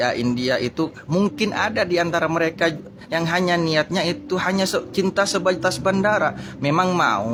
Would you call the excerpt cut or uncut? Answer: uncut